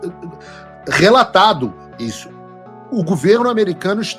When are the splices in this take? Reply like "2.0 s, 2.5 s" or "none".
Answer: 2.3 s